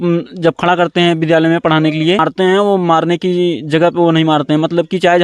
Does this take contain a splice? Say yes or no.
yes